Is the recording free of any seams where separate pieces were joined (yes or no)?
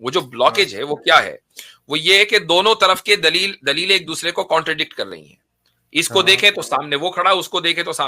yes